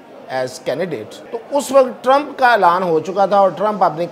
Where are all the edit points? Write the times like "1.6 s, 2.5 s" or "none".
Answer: 1.2 s